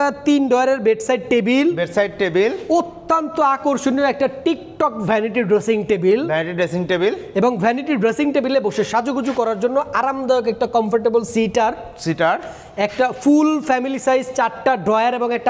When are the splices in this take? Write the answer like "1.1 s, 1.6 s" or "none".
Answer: none